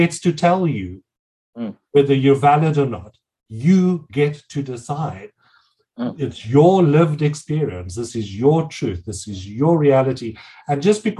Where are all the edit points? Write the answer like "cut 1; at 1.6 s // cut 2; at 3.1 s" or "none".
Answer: none